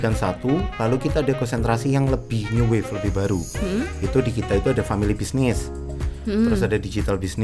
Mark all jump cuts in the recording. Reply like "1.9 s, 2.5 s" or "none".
none